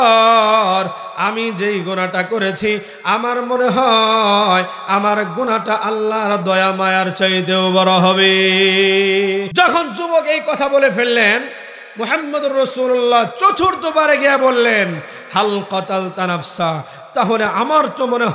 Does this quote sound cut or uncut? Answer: cut